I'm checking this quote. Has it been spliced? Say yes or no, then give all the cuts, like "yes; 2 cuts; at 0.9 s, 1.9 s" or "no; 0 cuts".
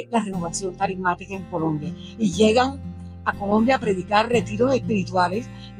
no; 0 cuts